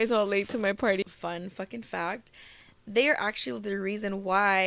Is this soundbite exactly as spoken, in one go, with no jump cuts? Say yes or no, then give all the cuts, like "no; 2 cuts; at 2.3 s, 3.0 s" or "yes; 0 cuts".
no; 1 cut; at 1.0 s